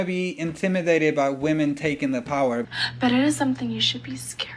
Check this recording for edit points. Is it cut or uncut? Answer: uncut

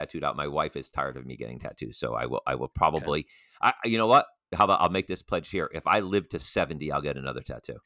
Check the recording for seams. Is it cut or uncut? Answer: cut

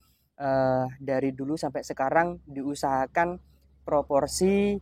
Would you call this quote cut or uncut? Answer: uncut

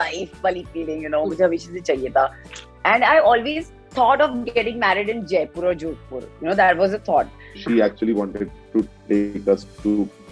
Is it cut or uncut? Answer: uncut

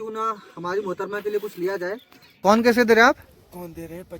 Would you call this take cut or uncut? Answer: cut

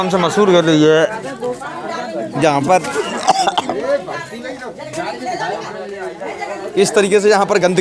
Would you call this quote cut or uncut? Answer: uncut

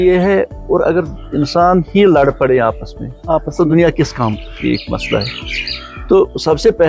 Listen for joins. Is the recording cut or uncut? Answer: uncut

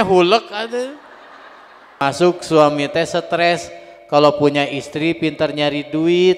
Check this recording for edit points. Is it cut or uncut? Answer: cut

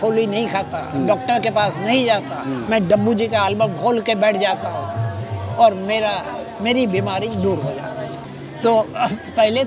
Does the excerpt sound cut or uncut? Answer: cut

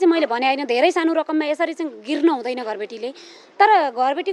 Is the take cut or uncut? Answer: uncut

